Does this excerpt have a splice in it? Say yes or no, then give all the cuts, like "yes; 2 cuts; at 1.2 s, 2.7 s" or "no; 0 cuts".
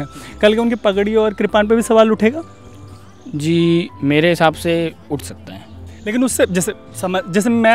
no; 0 cuts